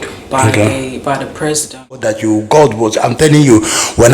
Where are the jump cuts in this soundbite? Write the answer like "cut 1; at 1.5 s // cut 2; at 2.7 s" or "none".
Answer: cut 1; at 2.2 s